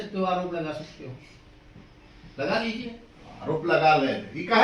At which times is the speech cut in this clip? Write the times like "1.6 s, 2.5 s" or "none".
none

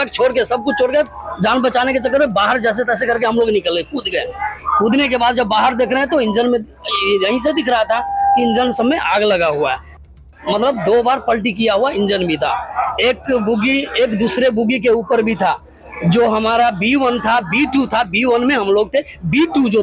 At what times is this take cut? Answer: 10.2 s

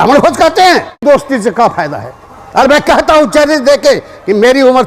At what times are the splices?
1.0 s

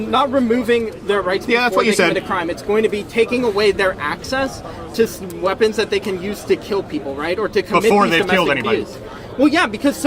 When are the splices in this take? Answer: none

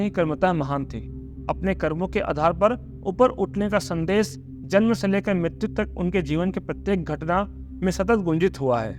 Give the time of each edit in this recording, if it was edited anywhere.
none

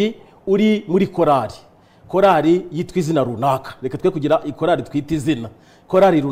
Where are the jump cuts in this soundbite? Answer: none

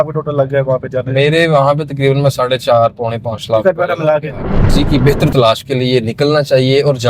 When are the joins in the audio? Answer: 4.7 s

